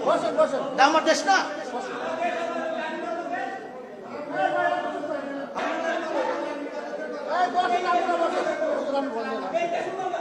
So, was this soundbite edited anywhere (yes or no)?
yes